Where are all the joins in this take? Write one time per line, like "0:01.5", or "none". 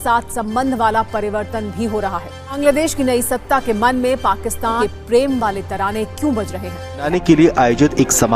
0:02.4
0:04.8
0:07.1